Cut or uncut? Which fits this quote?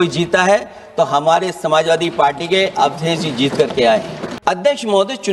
cut